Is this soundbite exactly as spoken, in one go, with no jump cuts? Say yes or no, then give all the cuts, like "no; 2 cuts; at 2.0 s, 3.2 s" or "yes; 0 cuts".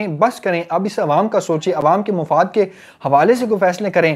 yes; 0 cuts